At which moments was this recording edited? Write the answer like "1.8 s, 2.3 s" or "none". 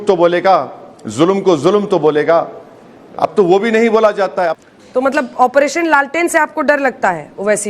4.6 s